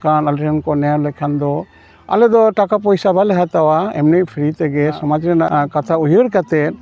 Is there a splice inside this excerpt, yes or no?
yes